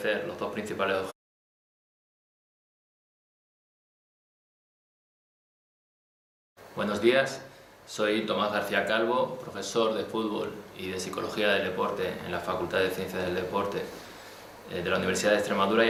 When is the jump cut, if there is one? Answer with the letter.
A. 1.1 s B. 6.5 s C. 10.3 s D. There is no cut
D